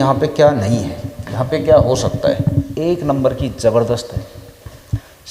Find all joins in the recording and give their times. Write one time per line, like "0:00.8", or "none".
0:02.7